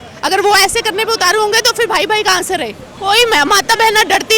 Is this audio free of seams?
no; 1 cut; at 2.9 s

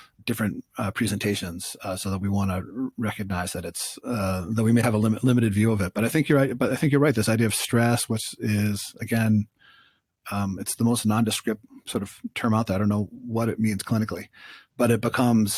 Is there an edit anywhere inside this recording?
no; 0 cuts

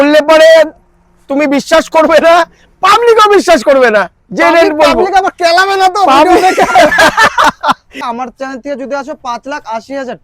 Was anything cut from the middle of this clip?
yes; 1 cut; at 8.0 s

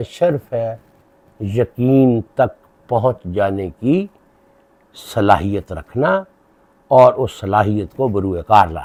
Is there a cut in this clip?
no; 0 cuts

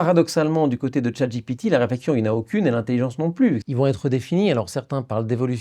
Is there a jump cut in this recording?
yes; 1 cut; at 3.7 s

